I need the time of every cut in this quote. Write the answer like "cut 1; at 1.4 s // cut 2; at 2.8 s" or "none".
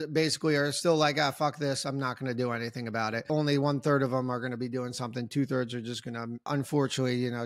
cut 1; at 3.2 s // cut 2; at 6.5 s